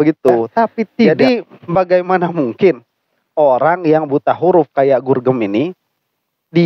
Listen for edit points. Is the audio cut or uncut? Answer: cut